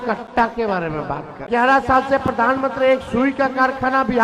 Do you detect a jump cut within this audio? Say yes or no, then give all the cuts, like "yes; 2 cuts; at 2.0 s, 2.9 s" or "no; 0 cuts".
yes; 1 cut; at 1.5 s